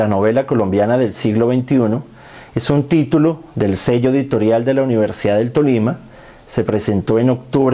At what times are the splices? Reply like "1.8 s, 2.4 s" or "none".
none